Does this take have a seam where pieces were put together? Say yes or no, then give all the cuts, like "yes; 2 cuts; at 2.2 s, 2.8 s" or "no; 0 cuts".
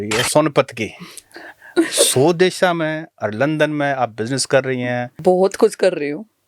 yes; 1 cut; at 5.1 s